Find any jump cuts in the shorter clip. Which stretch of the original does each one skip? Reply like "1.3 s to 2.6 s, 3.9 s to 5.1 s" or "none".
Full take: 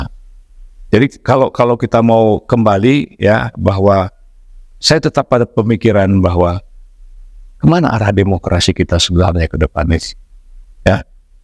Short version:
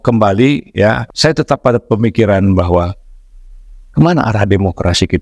3.5 s to 4.7 s